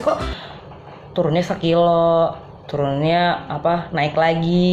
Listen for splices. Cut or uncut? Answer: uncut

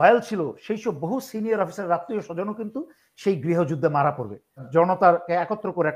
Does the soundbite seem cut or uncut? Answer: cut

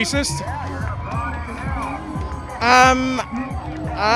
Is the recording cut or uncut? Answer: uncut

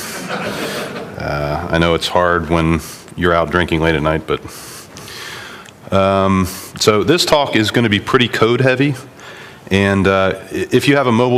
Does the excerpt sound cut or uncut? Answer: uncut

